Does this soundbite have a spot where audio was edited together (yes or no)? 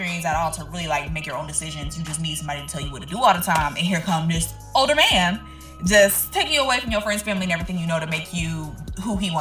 no